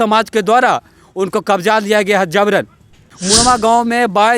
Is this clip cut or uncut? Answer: cut